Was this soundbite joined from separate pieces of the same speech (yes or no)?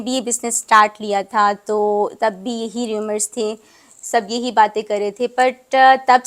no